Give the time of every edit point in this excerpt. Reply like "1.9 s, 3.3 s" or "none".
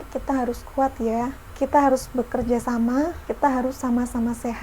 1.4 s, 3.2 s